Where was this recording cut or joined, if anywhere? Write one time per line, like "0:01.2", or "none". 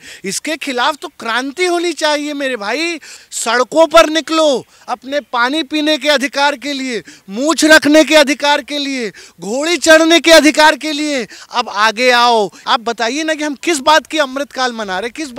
0:03.1
0:12.6